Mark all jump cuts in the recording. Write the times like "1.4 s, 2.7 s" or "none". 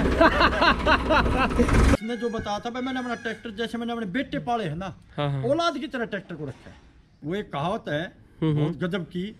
1.9 s, 7.2 s